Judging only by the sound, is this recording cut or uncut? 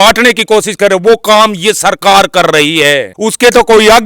cut